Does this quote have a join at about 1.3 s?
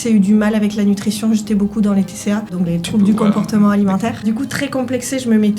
no; 2 cuts; at 2.5 s, 4.3 s

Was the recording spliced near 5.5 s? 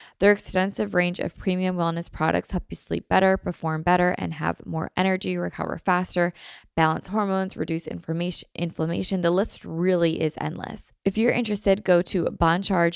no; 1 cut; at 10.8 s

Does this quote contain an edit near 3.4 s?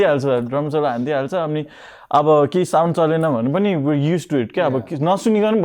no; 0 cuts

